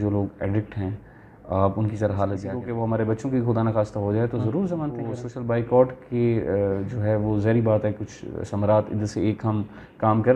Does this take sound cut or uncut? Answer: cut